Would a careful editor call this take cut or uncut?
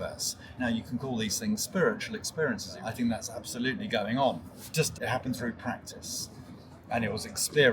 cut